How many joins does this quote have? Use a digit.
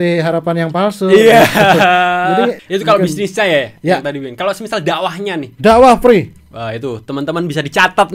1